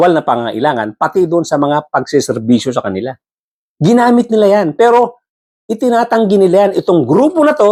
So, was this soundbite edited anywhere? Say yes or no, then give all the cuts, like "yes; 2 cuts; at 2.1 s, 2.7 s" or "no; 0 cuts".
no; 0 cuts